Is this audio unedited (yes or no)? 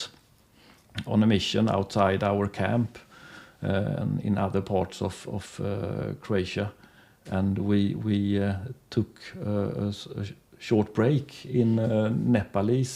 yes